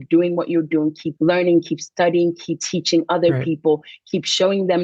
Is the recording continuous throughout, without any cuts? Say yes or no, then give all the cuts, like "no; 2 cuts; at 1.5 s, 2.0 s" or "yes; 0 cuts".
no; 2 cuts; at 1.1 s, 2.6 s